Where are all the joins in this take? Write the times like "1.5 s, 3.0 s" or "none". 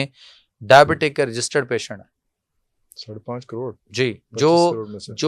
none